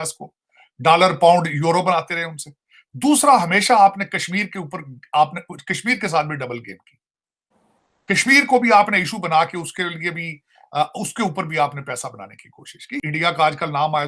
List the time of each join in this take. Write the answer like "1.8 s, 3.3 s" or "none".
12.9 s